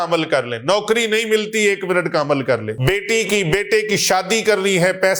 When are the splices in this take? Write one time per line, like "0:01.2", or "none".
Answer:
0:02.7

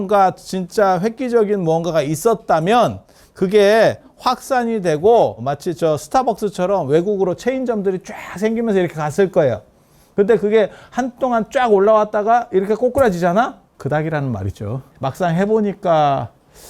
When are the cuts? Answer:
0:05.4
0:13.7
0:14.9

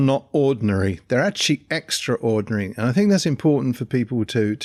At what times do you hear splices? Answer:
none

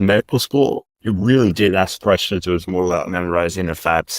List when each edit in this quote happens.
0:00.9

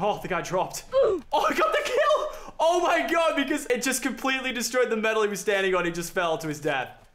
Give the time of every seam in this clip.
0:03.6

